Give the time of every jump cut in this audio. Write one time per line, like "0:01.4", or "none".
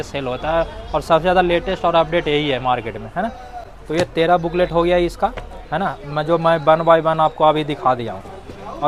none